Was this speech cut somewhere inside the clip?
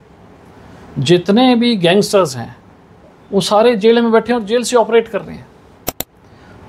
no; 0 cuts

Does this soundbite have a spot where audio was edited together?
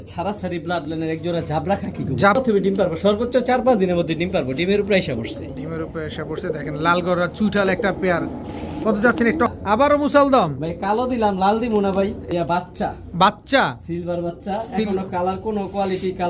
yes; 3 cuts; at 2.4 s, 9.5 s, 12.2 s

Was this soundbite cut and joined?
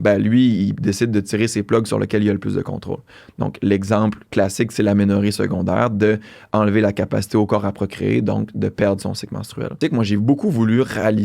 yes; 1 cut; at 9.8 s

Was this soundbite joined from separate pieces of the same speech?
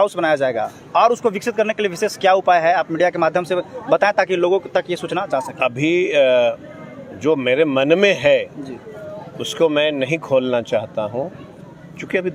no; 0 cuts

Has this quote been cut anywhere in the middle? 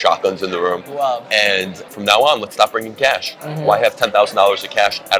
yes; 1 cut; at 1.8 s

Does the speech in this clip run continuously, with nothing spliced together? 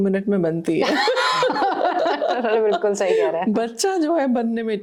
yes; 0 cuts

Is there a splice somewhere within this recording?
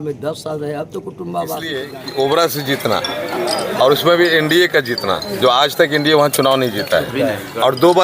yes; 1 cut; at 2.0 s

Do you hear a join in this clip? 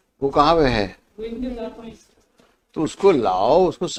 no; 0 cuts

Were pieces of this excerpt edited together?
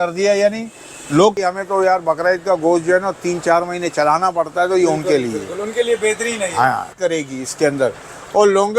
yes; 2 cuts; at 1.4 s, 7.0 s

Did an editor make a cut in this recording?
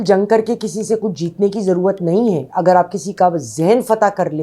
no; 0 cuts

